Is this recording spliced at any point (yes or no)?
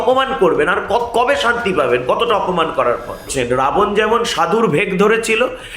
yes